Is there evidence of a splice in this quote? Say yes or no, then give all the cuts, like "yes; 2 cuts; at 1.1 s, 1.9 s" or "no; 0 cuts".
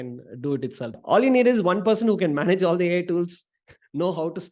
yes; 1 cut; at 1.0 s